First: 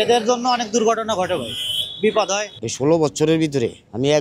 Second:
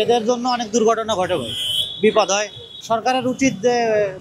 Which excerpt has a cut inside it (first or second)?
first